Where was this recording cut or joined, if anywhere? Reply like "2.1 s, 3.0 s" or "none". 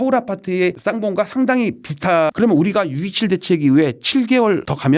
none